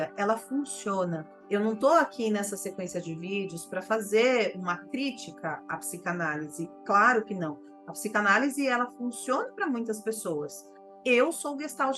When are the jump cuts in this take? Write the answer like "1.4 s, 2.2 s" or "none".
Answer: 5.6 s